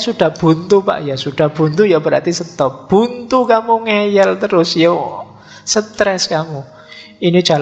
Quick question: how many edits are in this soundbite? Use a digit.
1